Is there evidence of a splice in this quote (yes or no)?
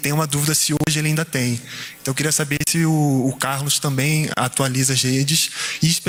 no